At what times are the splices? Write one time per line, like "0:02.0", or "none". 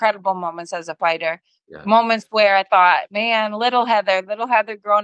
none